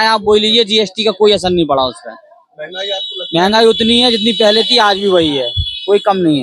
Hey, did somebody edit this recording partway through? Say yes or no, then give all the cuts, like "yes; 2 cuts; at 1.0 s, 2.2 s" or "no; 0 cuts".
no; 0 cuts